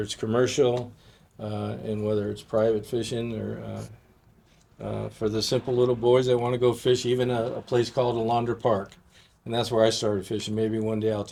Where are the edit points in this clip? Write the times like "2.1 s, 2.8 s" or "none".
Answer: none